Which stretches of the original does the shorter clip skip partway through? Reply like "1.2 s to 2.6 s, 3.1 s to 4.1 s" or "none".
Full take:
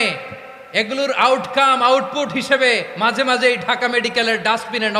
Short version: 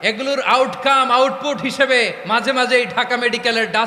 none

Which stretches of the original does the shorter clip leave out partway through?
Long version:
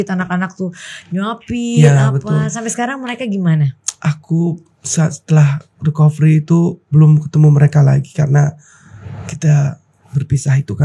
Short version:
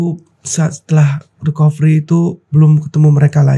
none

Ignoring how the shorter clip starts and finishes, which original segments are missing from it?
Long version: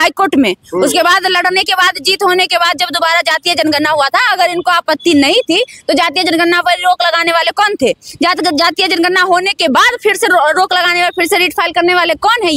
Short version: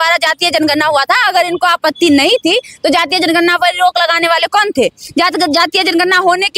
none

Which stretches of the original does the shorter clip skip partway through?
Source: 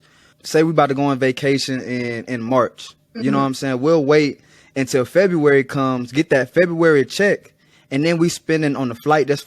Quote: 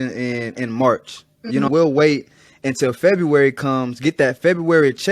3.4 s to 3.8 s

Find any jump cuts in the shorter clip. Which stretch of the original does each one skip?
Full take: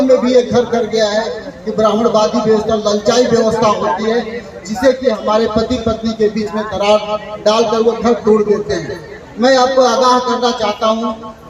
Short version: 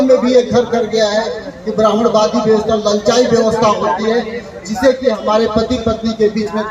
none

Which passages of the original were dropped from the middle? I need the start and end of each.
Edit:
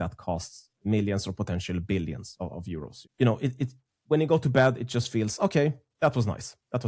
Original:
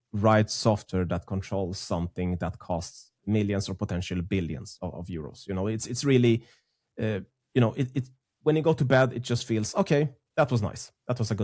5.4 s to 7.3 s

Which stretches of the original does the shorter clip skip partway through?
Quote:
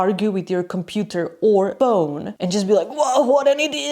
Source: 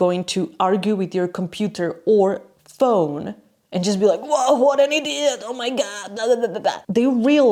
2.6 s to 3.3 s

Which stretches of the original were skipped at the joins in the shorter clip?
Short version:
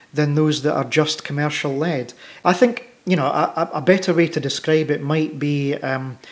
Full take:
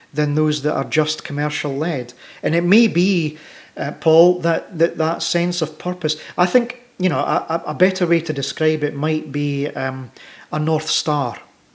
2.3 s to 6.2 s

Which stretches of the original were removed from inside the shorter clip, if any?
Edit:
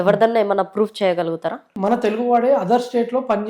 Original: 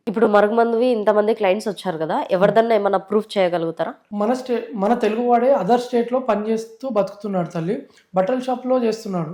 4.0 s to 4.7 s

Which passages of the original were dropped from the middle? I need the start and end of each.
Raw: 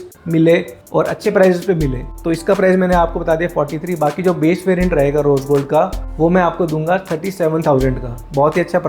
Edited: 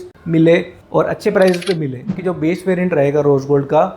2.2 s to 4.2 s

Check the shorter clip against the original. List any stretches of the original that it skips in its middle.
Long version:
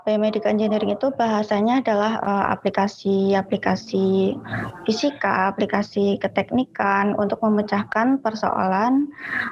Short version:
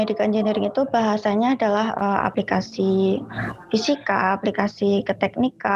2.6 s to 3.5 s

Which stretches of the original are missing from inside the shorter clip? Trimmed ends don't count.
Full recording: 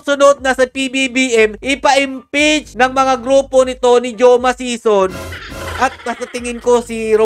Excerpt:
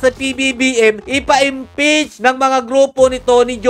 none

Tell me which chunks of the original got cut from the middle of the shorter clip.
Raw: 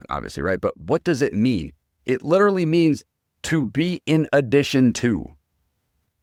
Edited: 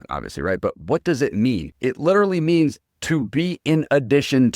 1.7 s to 1.9 s, 3.2 s to 3.3 s

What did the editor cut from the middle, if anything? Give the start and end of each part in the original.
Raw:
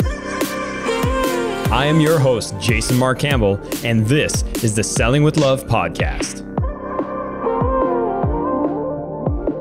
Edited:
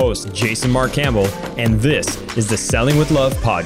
none

